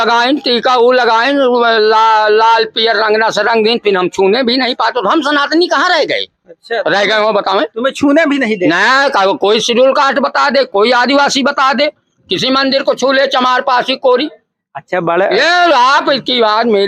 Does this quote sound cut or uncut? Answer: uncut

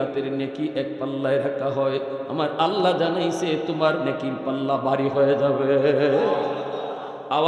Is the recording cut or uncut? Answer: uncut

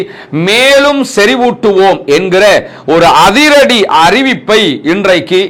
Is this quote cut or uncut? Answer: uncut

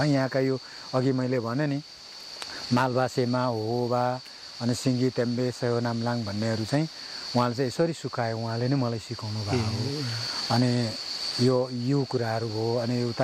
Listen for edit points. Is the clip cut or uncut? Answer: uncut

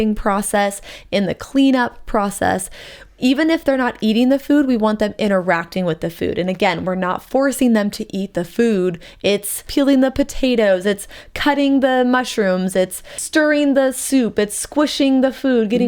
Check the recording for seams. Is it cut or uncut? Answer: cut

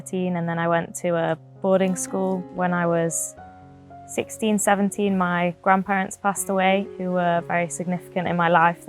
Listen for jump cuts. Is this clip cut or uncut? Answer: cut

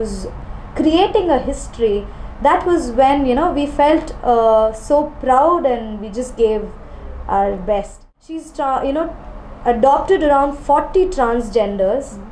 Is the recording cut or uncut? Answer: cut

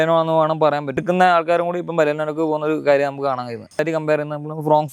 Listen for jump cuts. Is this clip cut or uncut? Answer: cut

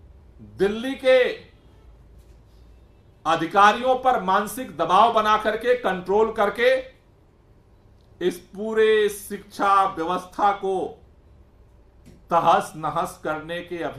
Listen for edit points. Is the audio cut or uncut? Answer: uncut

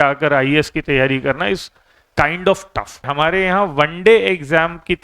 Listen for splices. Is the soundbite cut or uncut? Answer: cut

